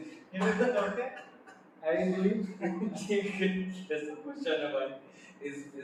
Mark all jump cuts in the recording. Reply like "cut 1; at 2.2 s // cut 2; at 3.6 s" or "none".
none